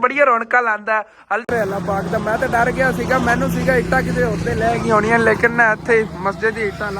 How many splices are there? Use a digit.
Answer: 1